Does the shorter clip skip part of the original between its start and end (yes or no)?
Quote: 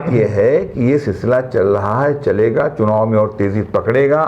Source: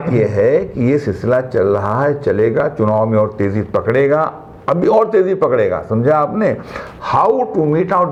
no